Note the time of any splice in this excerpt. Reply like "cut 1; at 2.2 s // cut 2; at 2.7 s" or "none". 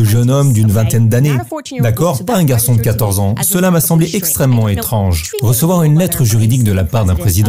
cut 1; at 5.2 s